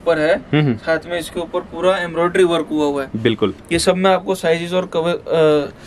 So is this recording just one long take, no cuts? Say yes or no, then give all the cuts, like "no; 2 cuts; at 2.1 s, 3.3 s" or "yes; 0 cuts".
yes; 0 cuts